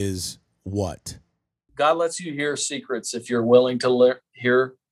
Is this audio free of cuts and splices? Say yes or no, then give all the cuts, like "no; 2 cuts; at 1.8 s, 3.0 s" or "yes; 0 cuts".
no; 1 cut; at 1.6 s